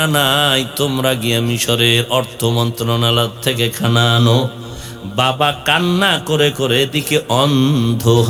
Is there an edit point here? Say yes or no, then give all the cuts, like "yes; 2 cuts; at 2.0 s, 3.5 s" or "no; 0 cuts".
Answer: no; 0 cuts